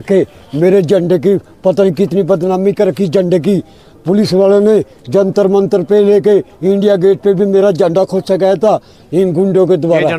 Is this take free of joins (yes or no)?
yes